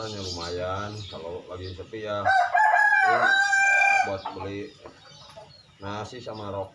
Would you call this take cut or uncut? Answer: uncut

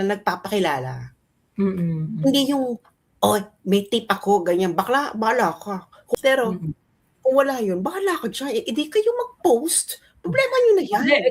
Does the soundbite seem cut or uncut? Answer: cut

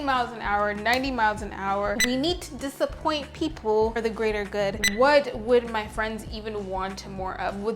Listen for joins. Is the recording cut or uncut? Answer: cut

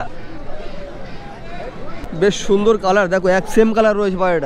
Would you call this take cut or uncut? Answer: cut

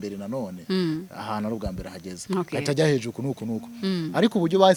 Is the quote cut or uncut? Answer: uncut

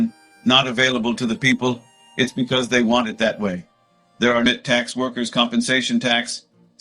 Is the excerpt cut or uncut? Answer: cut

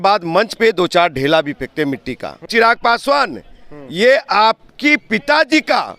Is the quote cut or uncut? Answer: cut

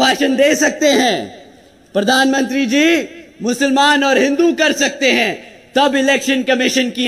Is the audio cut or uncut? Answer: uncut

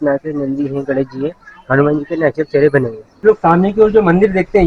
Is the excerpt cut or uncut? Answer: cut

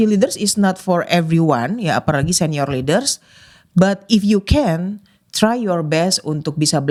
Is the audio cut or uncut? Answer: uncut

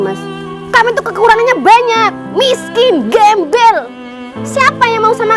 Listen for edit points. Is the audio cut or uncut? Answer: uncut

